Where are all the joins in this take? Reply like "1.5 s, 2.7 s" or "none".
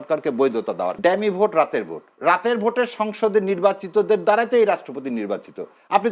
0.9 s